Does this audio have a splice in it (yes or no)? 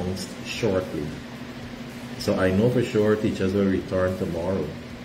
no